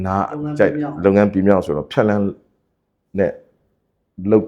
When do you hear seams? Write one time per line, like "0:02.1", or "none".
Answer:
none